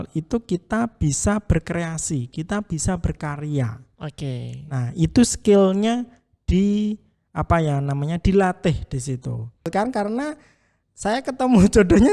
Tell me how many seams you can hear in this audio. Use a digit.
1